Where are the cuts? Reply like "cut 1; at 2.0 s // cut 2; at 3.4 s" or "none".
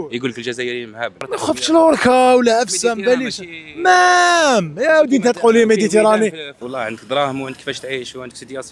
cut 1; at 1.3 s // cut 2; at 6.5 s